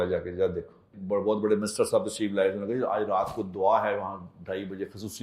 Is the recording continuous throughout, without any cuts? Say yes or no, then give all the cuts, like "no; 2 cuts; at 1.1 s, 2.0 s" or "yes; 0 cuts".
no; 1 cut; at 0.9 s